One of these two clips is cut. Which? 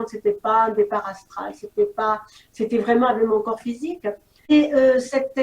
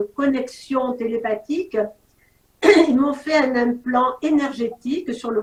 first; 1 cut; at 4.5 s

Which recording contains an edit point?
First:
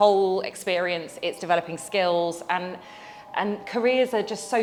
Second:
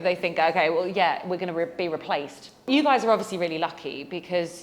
second; 1 cut; at 2.7 s

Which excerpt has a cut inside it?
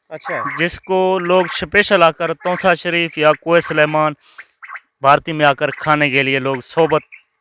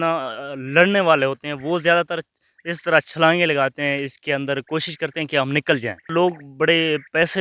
second; 1 cut; at 6.1 s

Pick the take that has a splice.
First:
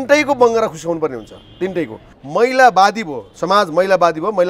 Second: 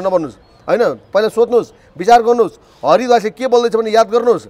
first; 1 cut; at 2.1 s

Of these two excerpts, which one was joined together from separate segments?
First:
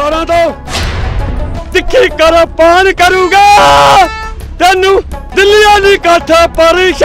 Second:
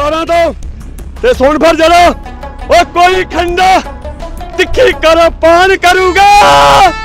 first; 1 cut; at 1.1 s

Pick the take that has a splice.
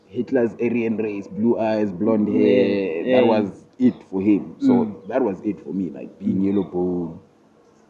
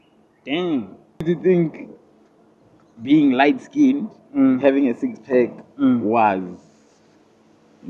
second; 1 cut; at 1.2 s

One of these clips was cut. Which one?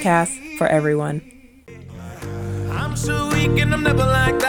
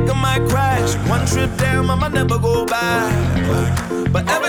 first; 1 cut; at 1.9 s

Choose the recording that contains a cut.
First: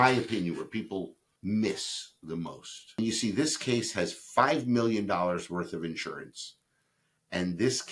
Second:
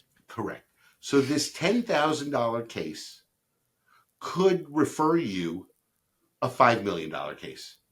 first; 2 cuts; at 1.2 s, 3.0 s

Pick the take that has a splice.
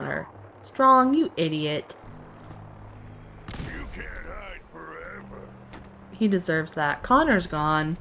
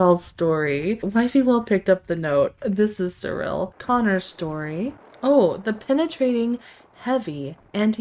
second; 3 cuts; at 1.0 s, 3.7 s, 5.0 s

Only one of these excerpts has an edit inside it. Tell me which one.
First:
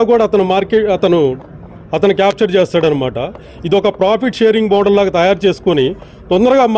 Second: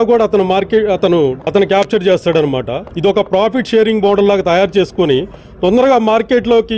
second; 2 cuts; at 1.4 s, 2.8 s

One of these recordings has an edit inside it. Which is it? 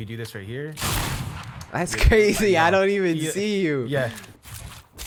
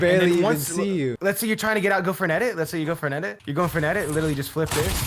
second; 2 cuts; at 1.2 s, 3.4 s

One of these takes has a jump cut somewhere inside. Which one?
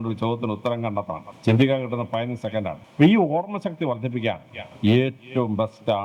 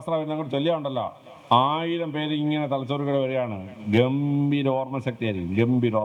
first; 2 cuts; at 1.3 s, 2.8 s

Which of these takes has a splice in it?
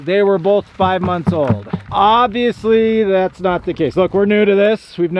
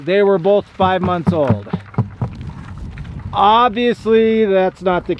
first; 1 cut; at 1.8 s

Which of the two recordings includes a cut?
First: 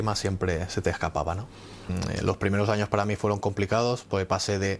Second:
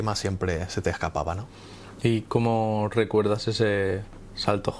first; 1 cut; at 1.9 s

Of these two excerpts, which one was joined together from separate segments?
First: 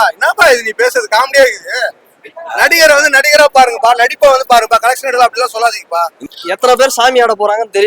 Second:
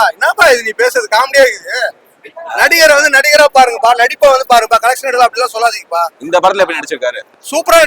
first; 1 cut; at 6.2 s

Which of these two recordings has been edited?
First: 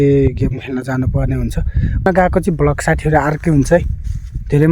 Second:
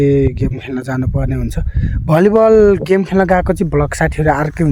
first; 1 cut; at 2.1 s

